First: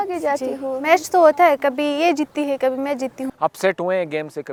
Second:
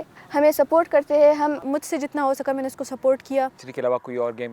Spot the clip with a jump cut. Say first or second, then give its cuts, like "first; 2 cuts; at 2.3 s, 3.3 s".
second; 2 cuts; at 1.7 s, 3.6 s